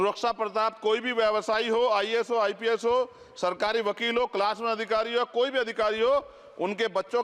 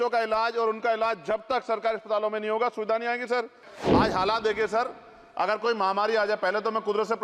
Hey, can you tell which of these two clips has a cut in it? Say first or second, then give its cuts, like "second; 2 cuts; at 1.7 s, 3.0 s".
second; 1 cut; at 3.7 s